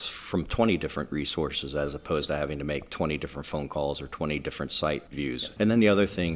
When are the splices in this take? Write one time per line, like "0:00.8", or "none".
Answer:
0:05.2